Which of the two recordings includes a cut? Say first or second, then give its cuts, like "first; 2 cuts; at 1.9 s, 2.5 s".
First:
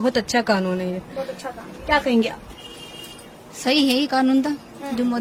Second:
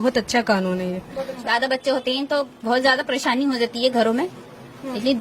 second; 1 cut; at 1.3 s